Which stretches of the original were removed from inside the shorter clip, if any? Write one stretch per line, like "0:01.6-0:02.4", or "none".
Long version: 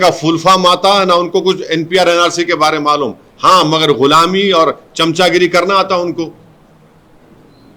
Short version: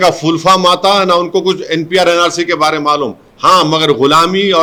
none